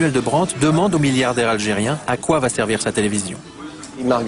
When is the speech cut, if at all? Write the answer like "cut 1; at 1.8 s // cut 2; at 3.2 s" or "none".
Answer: none